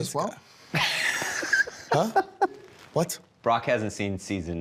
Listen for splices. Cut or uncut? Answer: cut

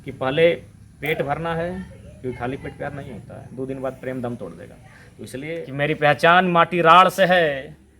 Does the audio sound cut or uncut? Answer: cut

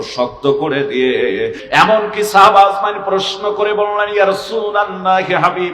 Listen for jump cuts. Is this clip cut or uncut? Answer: cut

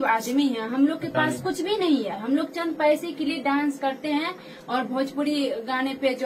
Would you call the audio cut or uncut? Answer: uncut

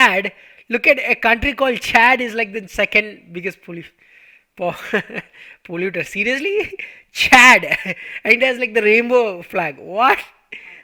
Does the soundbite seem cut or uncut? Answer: uncut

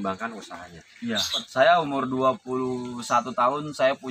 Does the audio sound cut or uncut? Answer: cut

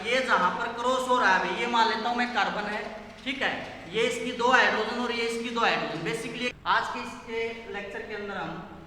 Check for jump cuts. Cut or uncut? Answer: cut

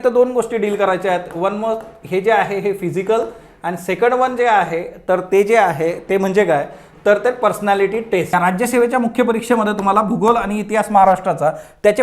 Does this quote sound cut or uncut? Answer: cut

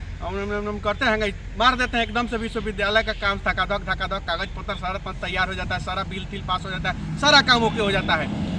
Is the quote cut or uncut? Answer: uncut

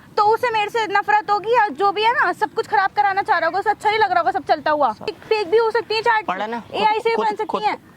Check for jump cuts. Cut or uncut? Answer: cut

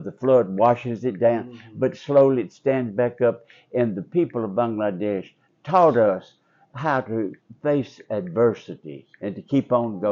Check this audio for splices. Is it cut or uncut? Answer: uncut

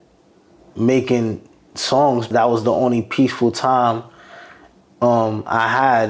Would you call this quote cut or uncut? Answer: cut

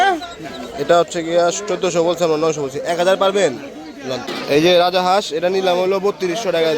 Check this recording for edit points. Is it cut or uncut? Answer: cut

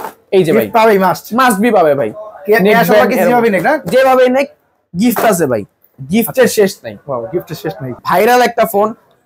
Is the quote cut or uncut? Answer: cut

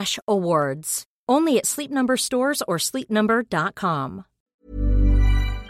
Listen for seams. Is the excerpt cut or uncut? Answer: cut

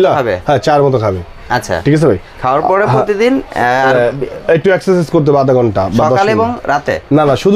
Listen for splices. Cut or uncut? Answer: uncut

